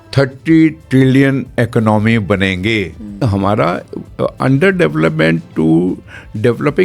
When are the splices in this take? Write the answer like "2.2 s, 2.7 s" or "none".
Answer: 3.2 s